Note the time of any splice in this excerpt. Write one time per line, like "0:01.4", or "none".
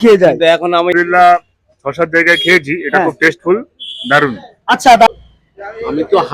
0:00.9
0:05.1